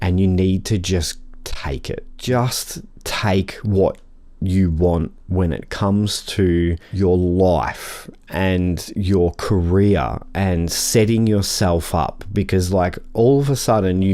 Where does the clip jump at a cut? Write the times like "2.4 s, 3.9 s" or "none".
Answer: 2.1 s, 6.8 s